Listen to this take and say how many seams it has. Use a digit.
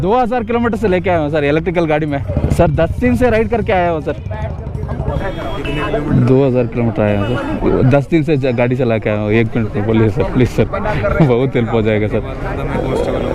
0